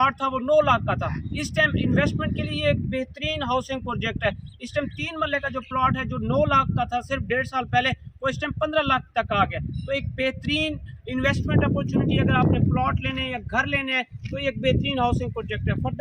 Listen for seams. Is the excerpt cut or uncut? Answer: uncut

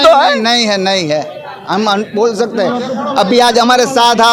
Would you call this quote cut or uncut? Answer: uncut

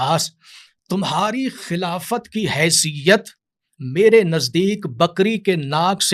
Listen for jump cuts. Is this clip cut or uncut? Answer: uncut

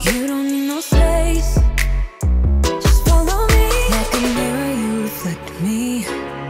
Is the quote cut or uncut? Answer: cut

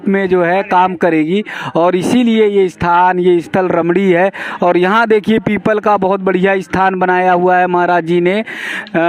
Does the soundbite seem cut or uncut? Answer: uncut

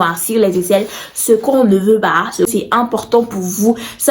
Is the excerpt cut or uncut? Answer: cut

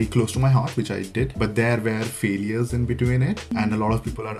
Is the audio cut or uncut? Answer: uncut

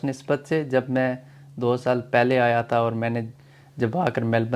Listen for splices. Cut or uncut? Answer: uncut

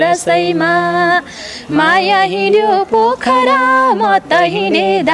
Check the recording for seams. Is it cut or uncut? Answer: uncut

